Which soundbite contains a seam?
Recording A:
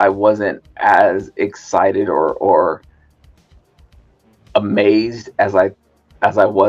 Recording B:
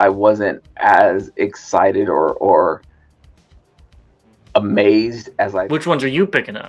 B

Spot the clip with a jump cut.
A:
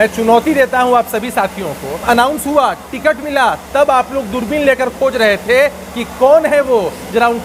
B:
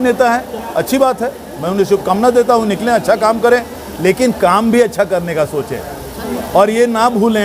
A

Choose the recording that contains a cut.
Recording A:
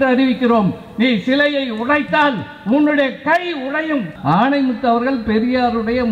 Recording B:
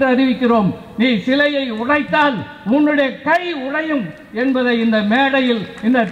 A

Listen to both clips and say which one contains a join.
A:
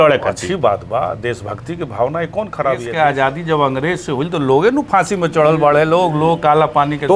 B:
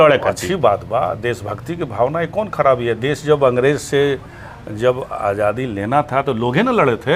A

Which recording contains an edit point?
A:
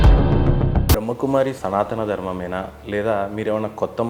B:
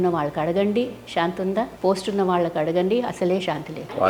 A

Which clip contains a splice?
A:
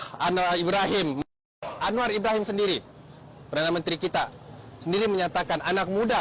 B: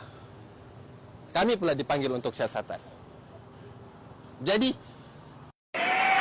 A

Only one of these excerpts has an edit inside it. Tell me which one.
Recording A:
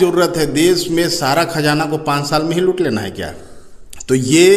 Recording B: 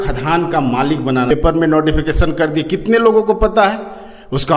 B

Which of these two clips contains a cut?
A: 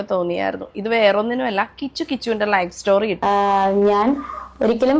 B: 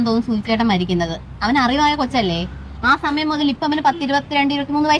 A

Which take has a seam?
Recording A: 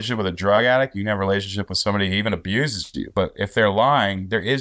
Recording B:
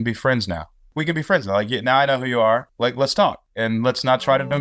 B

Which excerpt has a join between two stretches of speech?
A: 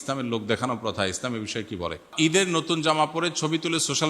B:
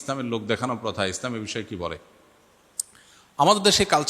A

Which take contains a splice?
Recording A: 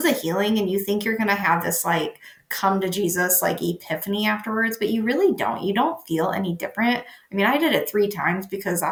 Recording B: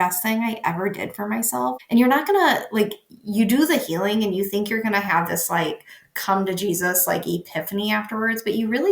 B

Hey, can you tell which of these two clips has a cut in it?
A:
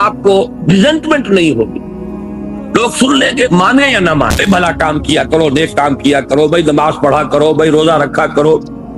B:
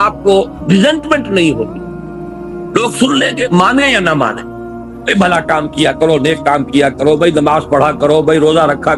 A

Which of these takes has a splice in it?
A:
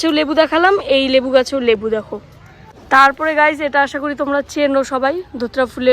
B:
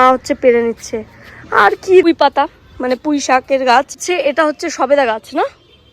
B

